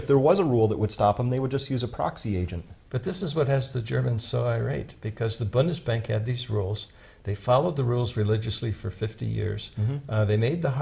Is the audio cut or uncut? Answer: uncut